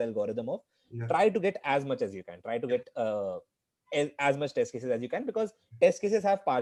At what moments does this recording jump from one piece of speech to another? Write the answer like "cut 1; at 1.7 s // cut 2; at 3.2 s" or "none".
none